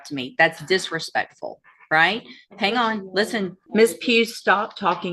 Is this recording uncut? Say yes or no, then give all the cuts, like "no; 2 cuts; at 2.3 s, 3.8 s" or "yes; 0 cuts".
no; 1 cut; at 3.6 s